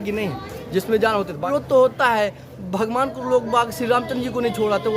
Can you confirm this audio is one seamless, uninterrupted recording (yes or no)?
no